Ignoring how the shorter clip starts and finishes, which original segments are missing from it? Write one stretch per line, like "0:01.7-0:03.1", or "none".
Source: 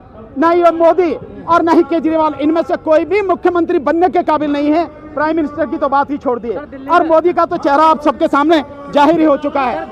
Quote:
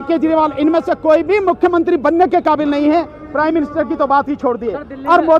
none

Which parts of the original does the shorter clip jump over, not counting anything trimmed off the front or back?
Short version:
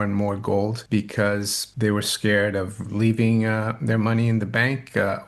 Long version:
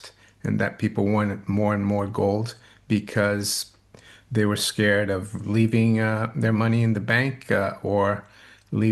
0:02.5-0:02.8
0:03.6-0:04.1

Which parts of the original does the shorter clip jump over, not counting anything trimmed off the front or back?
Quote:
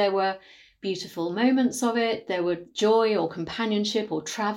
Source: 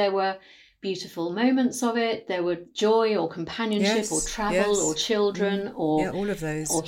none

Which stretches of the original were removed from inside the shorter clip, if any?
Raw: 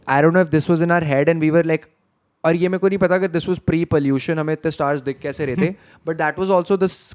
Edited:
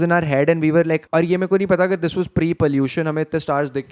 0:01.8-0:02.4

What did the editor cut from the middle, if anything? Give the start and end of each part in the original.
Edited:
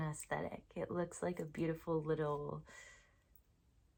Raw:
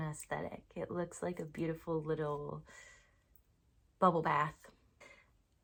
none

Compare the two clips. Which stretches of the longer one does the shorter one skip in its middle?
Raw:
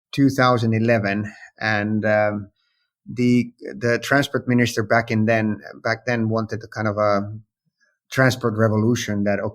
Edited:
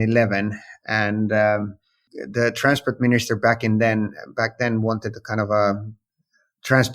0:02.9-0:03.6

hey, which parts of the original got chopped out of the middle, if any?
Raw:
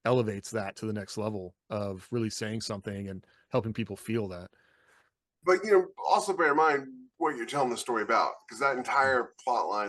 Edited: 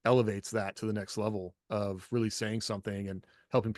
none

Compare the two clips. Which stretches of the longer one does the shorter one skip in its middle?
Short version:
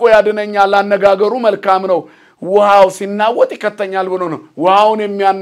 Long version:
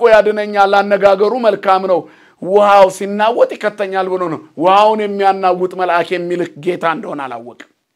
none

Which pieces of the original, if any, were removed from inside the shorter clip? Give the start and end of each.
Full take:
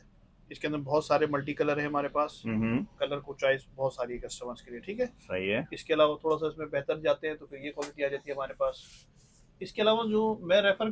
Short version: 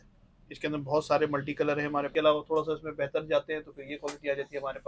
0:02.1-0:05.8

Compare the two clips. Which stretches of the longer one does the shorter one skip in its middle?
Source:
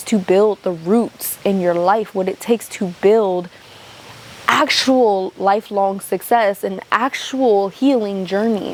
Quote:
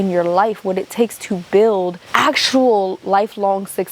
0:03.5-0:04.4

